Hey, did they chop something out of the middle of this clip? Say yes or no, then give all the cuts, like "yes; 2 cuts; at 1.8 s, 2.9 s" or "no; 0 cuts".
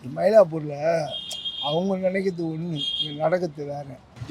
no; 0 cuts